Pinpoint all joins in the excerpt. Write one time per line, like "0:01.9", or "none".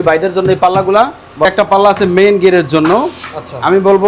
0:01.4

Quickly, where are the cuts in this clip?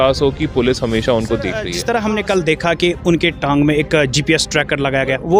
0:01.7

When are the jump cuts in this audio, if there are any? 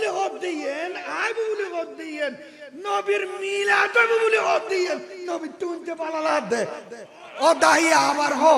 none

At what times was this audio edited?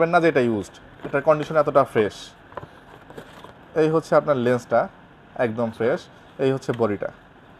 none

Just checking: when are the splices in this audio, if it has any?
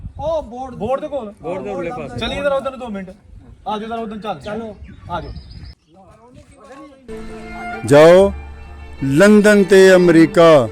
0:07.2

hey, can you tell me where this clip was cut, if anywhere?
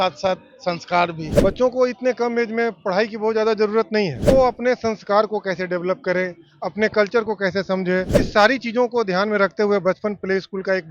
0:01.3
0:04.2
0:08.2

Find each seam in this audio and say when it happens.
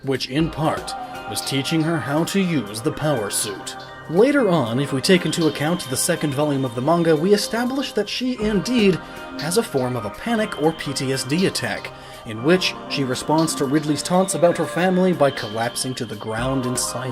0:03.2

